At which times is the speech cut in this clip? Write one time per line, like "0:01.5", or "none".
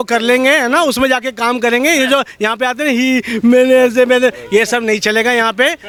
none